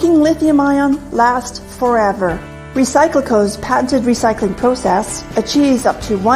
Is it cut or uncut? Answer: cut